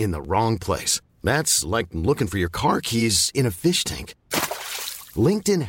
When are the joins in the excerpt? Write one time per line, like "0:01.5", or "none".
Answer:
none